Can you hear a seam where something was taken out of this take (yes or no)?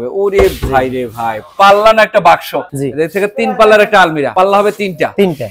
yes